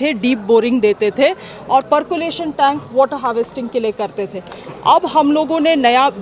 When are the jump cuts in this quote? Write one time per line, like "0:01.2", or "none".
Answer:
none